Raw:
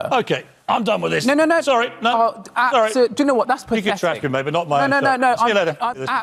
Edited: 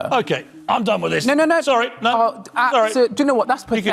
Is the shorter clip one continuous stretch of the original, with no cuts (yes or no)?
yes